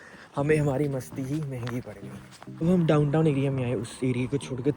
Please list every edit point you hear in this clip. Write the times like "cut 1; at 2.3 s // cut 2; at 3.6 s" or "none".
cut 1; at 2.6 s